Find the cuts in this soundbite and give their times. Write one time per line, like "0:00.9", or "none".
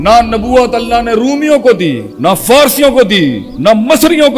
0:02.1
0:03.5